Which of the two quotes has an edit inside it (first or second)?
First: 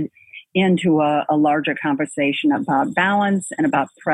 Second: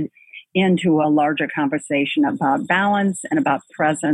second